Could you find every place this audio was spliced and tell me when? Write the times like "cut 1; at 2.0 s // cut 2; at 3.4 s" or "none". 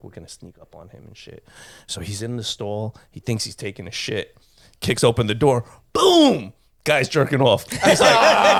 none